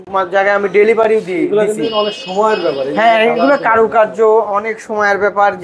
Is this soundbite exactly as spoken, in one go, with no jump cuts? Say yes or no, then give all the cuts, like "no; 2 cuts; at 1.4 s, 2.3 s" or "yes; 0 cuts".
yes; 0 cuts